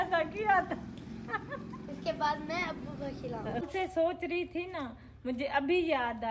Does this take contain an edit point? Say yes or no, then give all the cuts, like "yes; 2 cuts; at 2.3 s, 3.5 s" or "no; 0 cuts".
yes; 1 cut; at 3.7 s